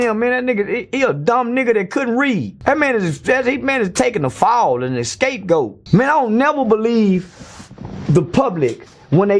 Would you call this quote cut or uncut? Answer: cut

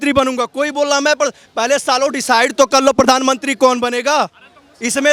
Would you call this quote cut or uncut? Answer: uncut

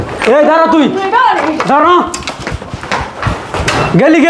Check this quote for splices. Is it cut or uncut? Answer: uncut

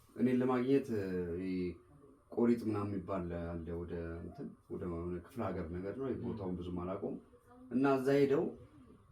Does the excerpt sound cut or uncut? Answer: uncut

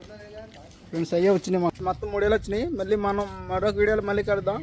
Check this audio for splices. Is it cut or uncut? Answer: cut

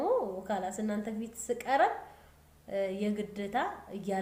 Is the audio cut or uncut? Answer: uncut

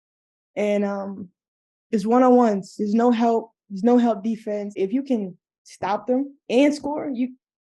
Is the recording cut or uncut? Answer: cut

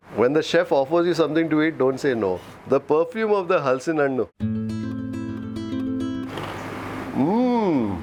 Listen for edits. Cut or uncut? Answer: uncut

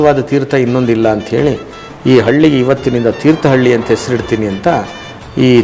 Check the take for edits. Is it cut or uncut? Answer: uncut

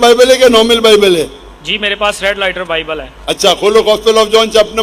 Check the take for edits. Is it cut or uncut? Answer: uncut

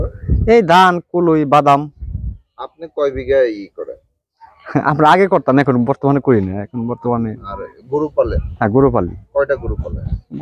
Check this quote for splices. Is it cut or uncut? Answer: uncut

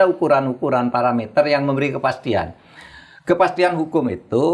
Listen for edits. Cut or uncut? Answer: uncut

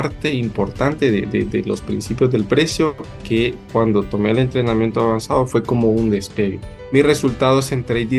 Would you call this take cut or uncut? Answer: uncut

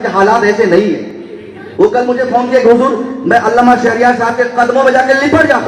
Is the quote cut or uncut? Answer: uncut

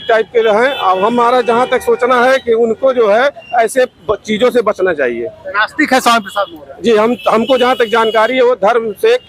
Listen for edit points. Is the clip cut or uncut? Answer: uncut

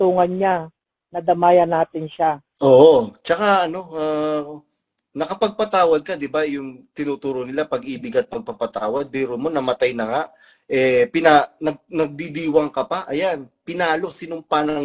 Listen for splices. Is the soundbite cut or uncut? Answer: uncut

